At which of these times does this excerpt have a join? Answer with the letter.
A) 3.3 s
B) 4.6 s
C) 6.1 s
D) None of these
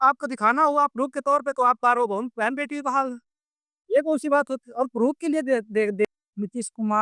C